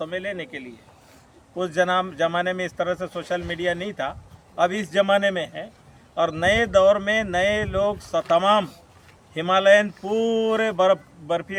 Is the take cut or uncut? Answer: uncut